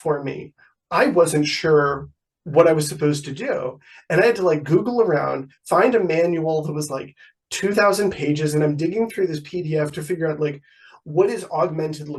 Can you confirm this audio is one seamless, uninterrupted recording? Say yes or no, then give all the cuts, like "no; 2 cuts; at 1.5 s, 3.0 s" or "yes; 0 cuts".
yes; 0 cuts